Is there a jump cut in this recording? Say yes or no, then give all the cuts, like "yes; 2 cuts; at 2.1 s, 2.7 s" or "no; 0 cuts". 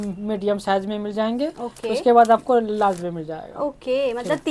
no; 0 cuts